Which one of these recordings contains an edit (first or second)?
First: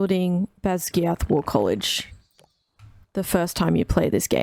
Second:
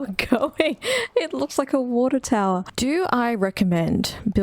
second